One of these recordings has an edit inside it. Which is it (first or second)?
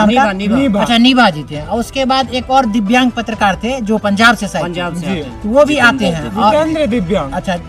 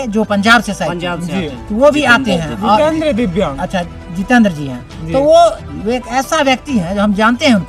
second